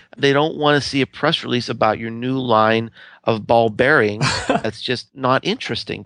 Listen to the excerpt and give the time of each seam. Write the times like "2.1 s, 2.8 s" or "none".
4.6 s